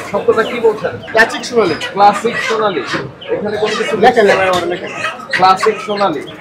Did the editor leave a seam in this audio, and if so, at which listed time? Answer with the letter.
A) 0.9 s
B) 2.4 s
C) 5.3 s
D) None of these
A